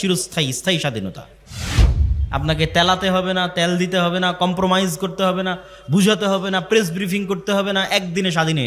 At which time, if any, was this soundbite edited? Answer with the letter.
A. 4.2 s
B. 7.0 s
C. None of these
C